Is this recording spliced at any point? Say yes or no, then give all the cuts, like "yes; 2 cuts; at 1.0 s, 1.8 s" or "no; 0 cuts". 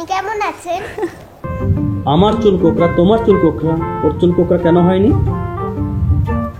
yes; 1 cut; at 1.5 s